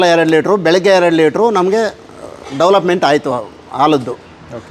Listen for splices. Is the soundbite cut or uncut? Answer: uncut